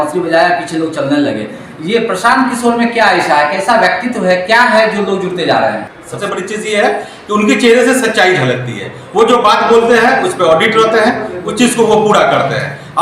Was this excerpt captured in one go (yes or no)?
no